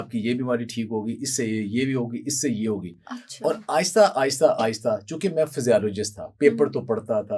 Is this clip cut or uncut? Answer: uncut